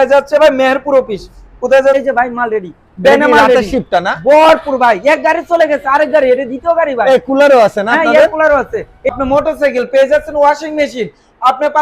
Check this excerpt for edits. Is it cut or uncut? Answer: cut